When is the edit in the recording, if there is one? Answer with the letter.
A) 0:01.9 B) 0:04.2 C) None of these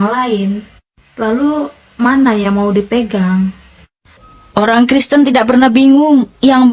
B